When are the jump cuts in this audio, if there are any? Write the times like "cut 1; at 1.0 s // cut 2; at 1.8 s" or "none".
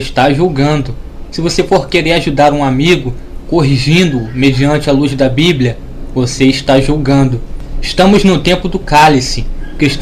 cut 1; at 4.8 s